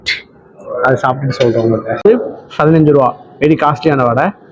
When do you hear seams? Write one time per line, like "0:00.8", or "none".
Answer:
0:02.0